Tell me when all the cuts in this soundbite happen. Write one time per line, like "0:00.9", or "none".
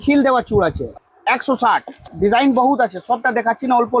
0:00.9
0:02.1